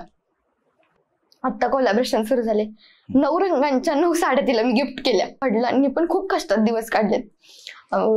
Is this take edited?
yes; 1 cut; at 5.4 s

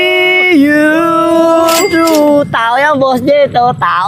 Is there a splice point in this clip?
no; 0 cuts

